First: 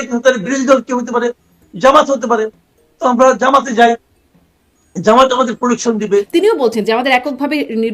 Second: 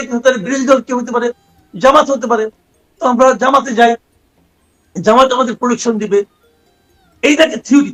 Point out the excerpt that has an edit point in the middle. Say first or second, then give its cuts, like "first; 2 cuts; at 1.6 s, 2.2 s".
first; 1 cut; at 6.3 s